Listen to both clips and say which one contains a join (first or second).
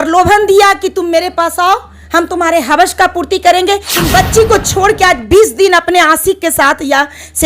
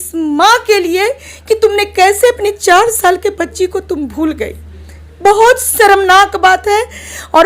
first